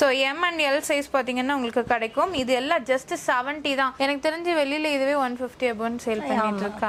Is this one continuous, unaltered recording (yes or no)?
yes